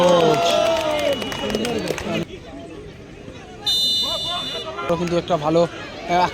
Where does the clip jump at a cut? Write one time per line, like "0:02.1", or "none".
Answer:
0:02.4
0:04.9